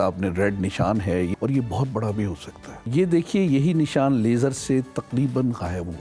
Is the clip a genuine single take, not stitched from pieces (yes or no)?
no